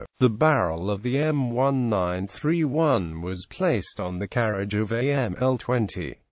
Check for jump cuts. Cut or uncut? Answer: cut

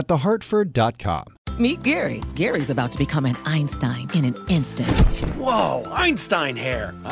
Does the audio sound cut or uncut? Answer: cut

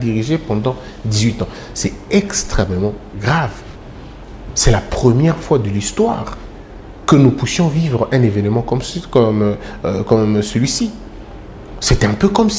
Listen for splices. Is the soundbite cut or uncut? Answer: uncut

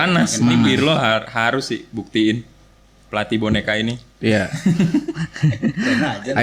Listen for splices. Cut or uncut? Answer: uncut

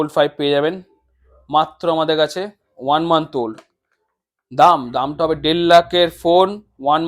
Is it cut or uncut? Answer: uncut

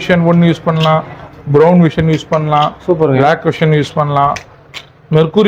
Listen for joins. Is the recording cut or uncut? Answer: uncut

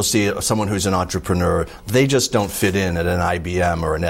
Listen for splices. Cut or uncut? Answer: uncut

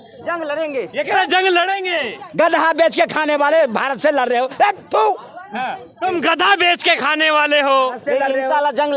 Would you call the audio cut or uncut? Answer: uncut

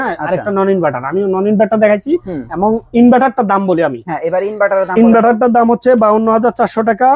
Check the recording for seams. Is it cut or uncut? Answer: uncut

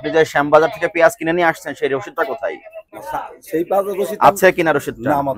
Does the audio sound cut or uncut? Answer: uncut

